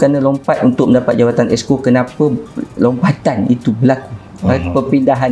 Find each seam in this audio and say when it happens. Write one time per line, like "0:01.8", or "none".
none